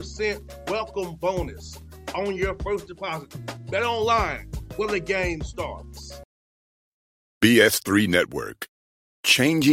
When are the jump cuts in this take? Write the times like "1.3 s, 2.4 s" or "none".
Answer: 6.1 s

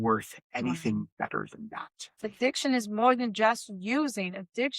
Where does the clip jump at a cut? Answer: 2.3 s

